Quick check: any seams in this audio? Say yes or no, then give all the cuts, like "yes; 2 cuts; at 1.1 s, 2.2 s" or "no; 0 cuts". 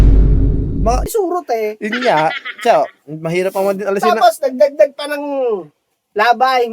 yes; 1 cut; at 1.1 s